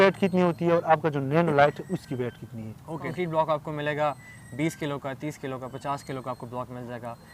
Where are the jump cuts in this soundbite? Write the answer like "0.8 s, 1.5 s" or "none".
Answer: 3.1 s